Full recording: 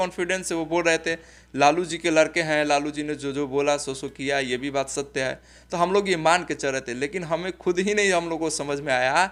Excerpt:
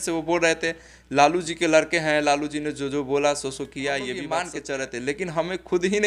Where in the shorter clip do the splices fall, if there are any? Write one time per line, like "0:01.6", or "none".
0:04.3